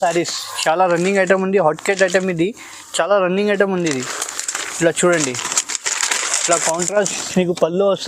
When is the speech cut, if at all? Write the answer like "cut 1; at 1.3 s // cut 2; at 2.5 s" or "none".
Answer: none